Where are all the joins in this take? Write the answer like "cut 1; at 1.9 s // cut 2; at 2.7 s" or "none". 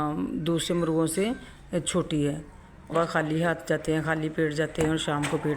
cut 1; at 2.9 s

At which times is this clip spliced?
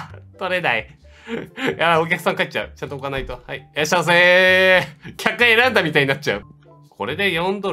cut 1; at 6.4 s

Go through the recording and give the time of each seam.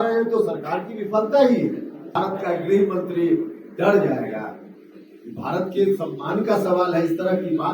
cut 1; at 2.0 s

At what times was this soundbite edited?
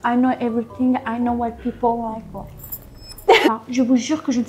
cut 1; at 3.5 s

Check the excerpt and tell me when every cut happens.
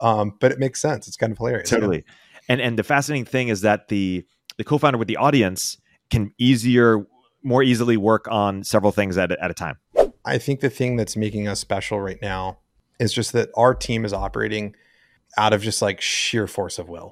cut 1; at 9.9 s

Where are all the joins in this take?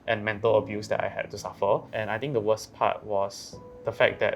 cut 1; at 1.9 s

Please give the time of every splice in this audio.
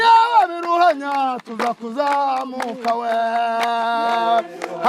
none

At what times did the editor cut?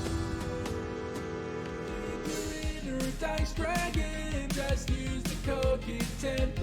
cut 1; at 2.3 s

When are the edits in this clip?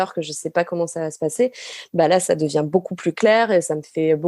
none

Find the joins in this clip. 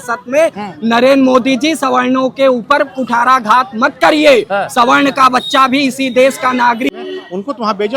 cut 1; at 6.9 s

